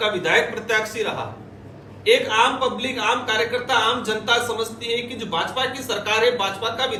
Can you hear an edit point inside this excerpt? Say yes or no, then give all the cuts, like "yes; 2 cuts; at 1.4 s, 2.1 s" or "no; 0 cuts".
no; 0 cuts